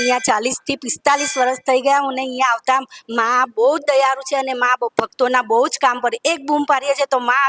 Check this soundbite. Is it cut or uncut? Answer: uncut